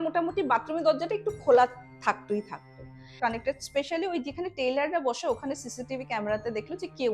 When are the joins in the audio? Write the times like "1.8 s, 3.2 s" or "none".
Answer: 3.1 s